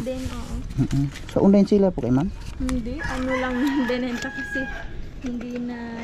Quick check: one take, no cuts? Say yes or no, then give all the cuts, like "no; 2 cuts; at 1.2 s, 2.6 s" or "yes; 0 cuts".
yes; 0 cuts